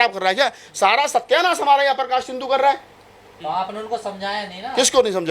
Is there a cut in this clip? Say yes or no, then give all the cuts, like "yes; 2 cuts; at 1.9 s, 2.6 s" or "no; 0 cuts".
no; 0 cuts